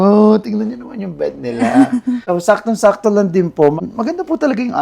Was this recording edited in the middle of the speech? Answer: yes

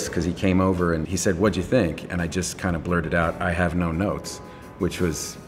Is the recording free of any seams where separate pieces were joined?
no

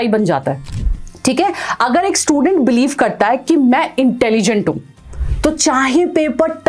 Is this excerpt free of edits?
yes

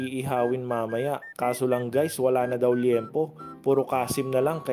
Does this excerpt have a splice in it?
no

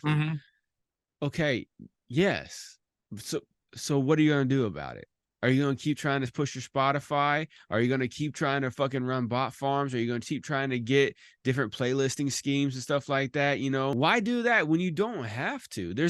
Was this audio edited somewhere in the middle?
yes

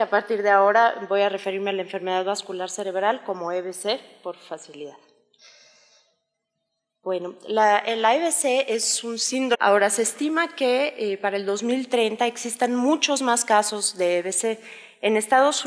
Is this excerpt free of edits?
yes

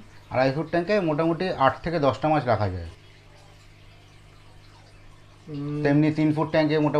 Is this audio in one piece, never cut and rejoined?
yes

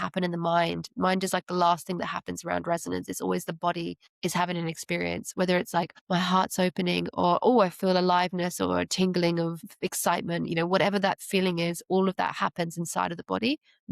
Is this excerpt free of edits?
no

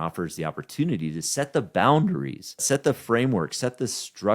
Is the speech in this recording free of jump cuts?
no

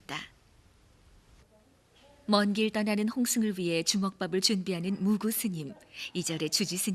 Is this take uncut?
no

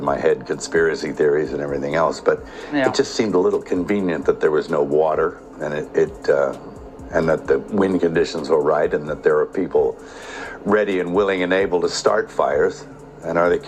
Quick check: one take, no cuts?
yes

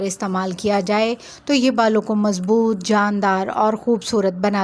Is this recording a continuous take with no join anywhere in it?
yes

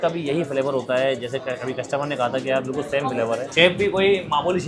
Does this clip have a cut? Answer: yes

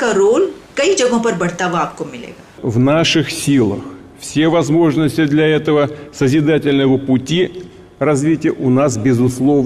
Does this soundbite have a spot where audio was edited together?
yes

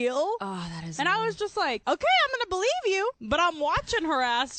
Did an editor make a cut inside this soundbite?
yes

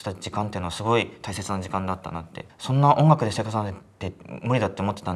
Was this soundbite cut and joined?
yes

